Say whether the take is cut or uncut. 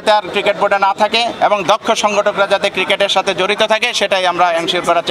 uncut